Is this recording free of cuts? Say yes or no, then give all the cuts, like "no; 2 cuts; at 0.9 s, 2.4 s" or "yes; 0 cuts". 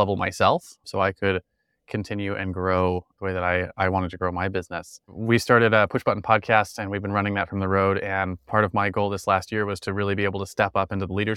yes; 0 cuts